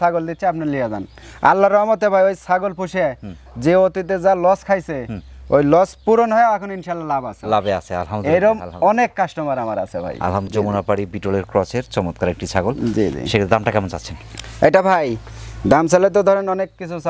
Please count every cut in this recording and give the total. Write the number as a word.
zero